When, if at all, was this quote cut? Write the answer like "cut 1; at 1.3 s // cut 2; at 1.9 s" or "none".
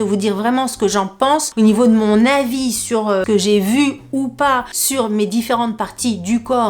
cut 1; at 1.5 s // cut 2; at 3.2 s // cut 3; at 4.8 s